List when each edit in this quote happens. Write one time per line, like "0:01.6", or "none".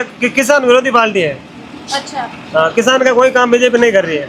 none